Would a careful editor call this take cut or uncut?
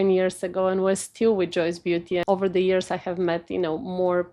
cut